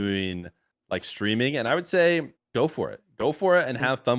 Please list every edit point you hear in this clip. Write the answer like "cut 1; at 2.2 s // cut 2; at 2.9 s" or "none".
cut 1; at 2.4 s